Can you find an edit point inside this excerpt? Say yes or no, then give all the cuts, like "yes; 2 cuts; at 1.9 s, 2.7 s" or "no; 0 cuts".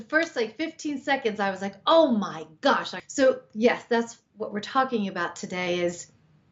yes; 1 cut; at 3.0 s